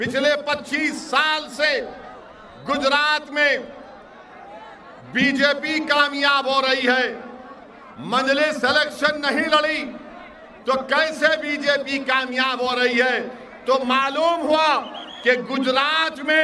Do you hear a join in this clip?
no; 0 cuts

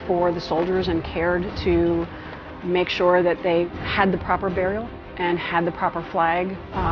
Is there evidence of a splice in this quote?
yes; 1 cut; at 3.7 s

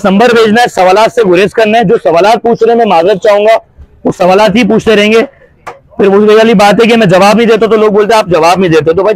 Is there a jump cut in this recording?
no; 0 cuts

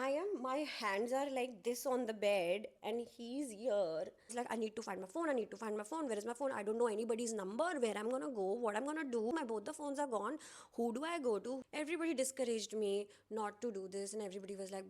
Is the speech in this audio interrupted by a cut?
yes; 3 cuts; at 4.3 s, 9.3 s, 11.6 s

